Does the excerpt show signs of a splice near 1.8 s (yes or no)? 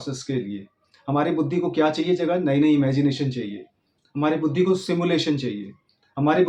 no